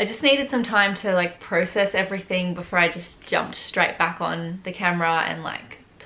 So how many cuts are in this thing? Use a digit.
0